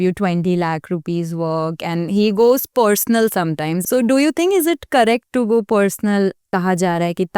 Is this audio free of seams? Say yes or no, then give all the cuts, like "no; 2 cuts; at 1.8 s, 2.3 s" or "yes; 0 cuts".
no; 2 cuts; at 3.8 s, 6.5 s